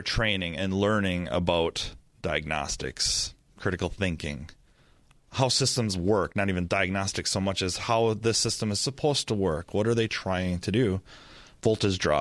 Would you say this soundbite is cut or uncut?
uncut